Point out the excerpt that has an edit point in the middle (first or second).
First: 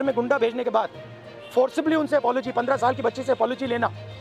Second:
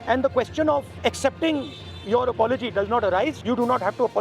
second